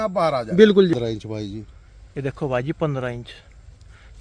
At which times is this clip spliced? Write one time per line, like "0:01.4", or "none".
0:00.9

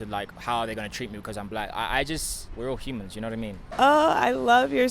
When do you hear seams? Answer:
0:03.7

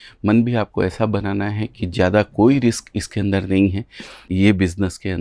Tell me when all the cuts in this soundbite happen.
0:04.2

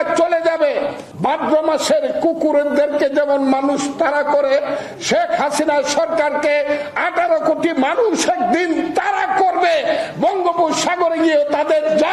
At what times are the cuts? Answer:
0:01.0

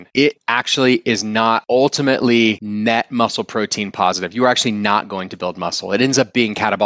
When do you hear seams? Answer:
0:01.6
0:02.6

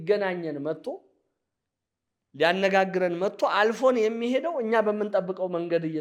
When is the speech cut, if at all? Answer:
none

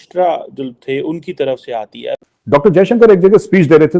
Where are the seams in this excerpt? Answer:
0:02.6

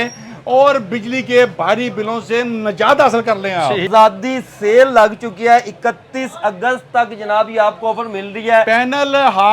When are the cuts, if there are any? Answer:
0:03.9
0:08.7

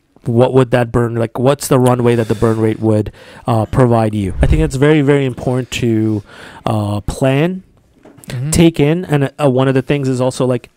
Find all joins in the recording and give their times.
0:04.3

